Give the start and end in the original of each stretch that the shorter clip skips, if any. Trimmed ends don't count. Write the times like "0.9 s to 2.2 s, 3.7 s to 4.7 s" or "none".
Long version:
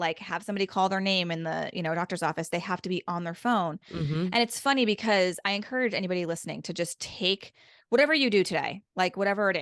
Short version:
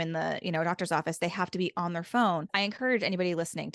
3.8 s to 5.4 s